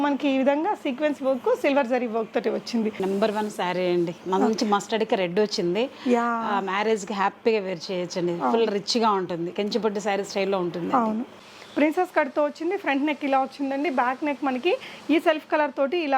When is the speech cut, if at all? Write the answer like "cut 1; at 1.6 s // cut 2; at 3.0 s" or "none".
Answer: cut 1; at 3.0 s // cut 2; at 11.4 s